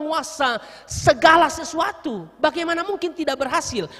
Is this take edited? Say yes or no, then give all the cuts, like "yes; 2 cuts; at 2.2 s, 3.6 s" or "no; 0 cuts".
no; 0 cuts